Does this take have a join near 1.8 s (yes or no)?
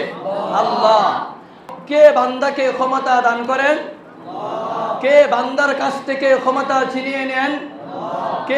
yes